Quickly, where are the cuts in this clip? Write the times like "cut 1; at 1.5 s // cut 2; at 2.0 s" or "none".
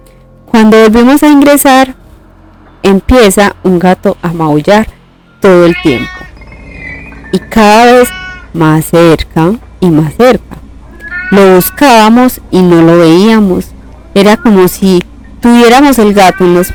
none

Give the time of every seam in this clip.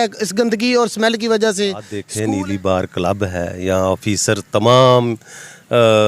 cut 1; at 2.0 s

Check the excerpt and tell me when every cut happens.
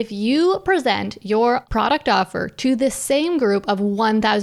cut 1; at 1.7 s

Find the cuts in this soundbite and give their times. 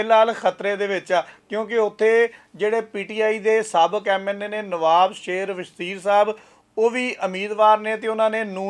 none

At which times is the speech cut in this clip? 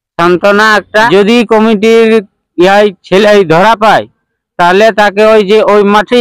cut 1; at 1.1 s

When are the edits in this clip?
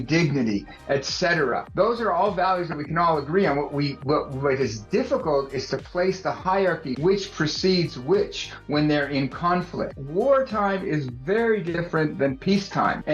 cut 1; at 10.0 s // cut 2; at 11.8 s

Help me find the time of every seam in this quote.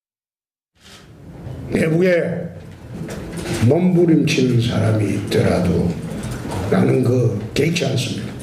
cut 1; at 3.6 s

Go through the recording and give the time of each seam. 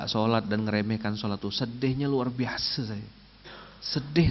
none

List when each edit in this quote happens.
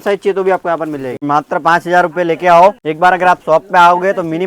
cut 1; at 1.2 s // cut 2; at 2.9 s

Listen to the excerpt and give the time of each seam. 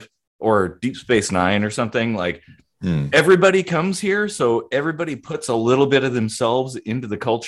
none

